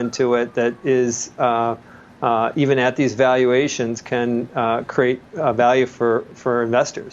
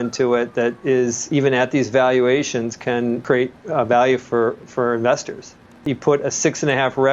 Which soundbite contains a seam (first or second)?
second